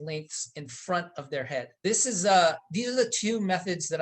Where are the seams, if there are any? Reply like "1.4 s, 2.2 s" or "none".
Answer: 1.8 s